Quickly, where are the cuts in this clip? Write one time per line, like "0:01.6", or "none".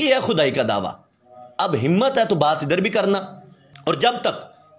0:03.7